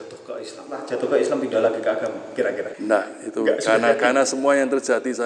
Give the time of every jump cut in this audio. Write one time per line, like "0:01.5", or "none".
0:00.9
0:02.7